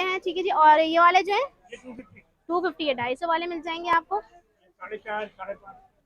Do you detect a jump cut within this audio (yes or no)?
no